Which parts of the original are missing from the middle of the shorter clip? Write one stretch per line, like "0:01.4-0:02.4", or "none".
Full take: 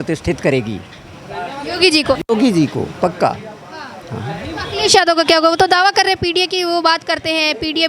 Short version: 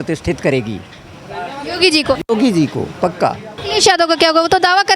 0:03.5-0:04.6